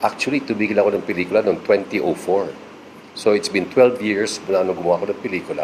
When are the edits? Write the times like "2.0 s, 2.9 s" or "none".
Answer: none